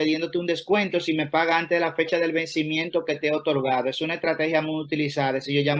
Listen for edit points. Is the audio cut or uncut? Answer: uncut